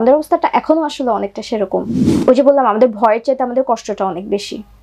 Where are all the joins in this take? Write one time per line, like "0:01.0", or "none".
0:02.0